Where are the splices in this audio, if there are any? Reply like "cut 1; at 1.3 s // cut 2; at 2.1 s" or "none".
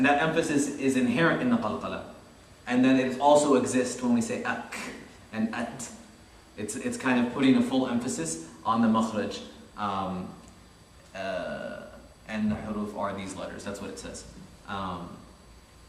cut 1; at 3.7 s